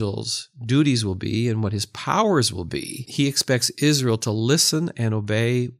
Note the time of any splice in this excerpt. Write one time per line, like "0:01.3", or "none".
0:03.0